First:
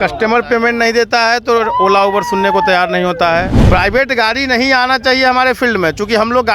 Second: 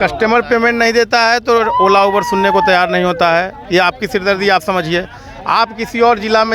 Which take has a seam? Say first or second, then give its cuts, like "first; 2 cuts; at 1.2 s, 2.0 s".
first; 1 cut; at 3.6 s